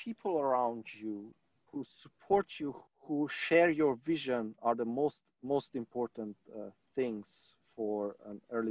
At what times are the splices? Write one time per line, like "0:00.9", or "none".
0:01.4
0:02.8